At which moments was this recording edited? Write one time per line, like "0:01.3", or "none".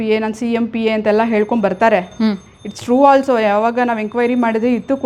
none